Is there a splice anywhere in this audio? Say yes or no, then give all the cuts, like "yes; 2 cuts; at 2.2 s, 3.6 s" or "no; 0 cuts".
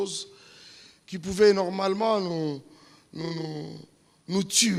no; 0 cuts